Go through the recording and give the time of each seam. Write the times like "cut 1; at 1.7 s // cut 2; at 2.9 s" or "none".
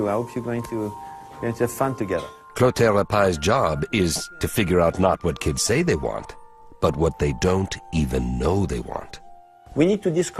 cut 1; at 2.2 s